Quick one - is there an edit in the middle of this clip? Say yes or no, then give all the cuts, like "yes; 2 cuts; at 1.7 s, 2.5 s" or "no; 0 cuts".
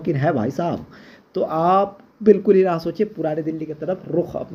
no; 0 cuts